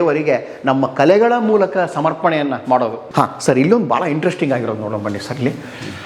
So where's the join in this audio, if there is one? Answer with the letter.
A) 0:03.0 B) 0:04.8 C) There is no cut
A